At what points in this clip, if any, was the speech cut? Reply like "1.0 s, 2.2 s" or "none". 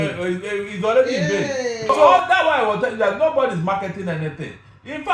2.1 s